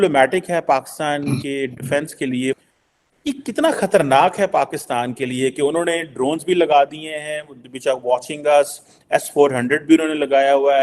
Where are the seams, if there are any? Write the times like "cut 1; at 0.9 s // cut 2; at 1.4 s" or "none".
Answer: cut 1; at 2.6 s